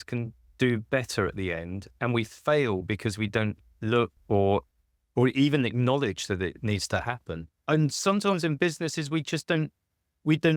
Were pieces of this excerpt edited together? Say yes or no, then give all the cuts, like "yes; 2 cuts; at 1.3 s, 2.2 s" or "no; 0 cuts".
yes; 2 cuts; at 4.2 s, 7.5 s